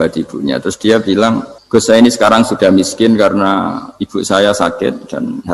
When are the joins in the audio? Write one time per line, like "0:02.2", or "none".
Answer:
0:01.5